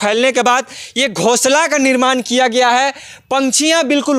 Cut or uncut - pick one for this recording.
uncut